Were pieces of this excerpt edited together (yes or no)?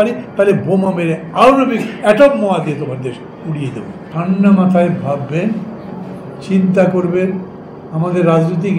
yes